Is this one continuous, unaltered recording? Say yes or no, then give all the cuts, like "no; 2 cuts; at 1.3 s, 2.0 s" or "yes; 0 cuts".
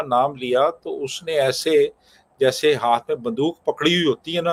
yes; 0 cuts